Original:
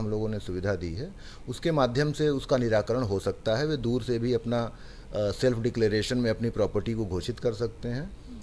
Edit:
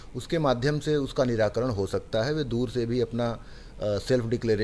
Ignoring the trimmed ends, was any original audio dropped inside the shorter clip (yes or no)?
no